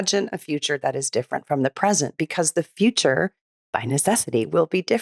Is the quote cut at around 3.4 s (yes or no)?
no